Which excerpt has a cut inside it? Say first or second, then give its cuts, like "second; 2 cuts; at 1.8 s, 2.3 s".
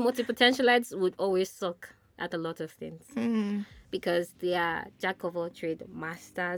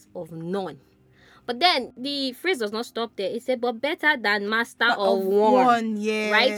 second; 1 cut; at 1.9 s